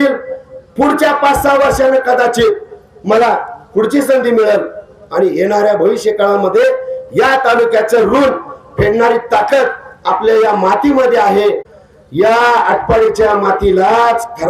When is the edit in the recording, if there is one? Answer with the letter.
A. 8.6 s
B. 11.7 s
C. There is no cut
B